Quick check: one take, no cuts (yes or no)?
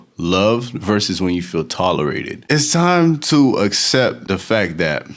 no